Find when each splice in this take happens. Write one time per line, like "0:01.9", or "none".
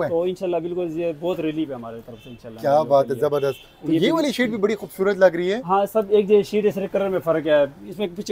none